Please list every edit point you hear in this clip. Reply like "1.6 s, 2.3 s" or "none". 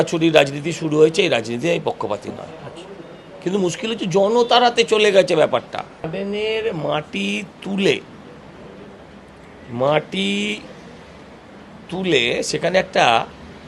6.1 s